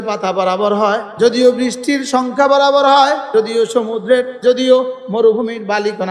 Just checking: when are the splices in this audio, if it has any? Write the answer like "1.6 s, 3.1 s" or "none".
1.1 s, 3.2 s, 4.4 s